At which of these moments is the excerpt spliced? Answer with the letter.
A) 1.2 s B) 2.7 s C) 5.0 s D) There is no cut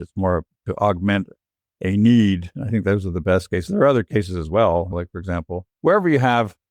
C